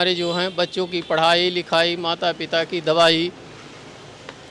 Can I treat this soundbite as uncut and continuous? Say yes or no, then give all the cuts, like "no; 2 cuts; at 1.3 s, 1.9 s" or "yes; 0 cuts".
yes; 0 cuts